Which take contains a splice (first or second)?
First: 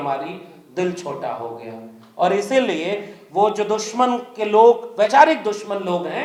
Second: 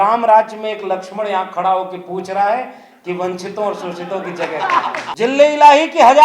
second